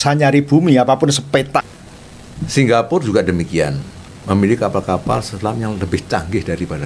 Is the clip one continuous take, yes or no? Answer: no